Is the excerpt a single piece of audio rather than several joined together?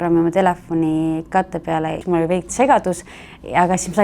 no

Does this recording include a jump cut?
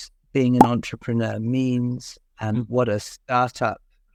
no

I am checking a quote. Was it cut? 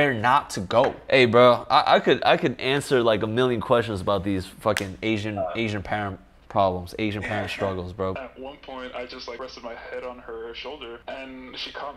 yes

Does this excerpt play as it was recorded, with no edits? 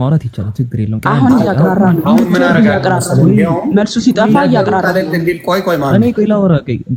yes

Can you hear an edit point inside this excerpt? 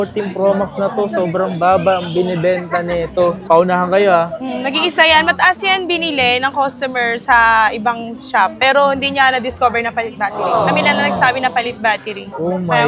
no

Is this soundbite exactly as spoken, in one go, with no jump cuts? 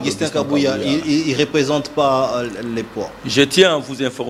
yes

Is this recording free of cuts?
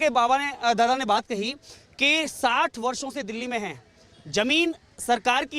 yes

